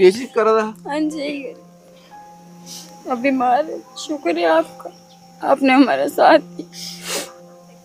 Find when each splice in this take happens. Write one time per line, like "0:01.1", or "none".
none